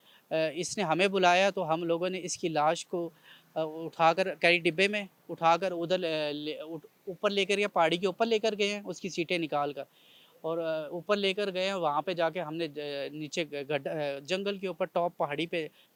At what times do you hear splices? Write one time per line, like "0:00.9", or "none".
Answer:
none